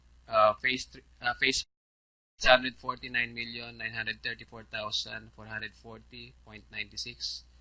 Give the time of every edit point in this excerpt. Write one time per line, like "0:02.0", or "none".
none

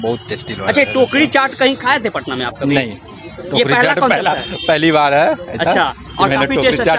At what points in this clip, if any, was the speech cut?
none

